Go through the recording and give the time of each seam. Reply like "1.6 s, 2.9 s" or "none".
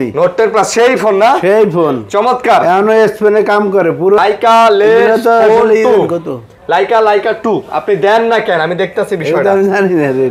4.2 s